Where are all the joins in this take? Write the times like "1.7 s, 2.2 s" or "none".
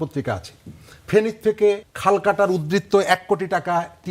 1.9 s